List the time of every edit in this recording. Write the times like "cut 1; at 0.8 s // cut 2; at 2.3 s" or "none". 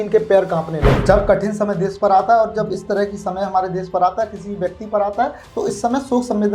cut 1; at 0.9 s